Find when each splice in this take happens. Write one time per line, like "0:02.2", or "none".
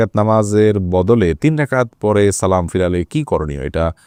none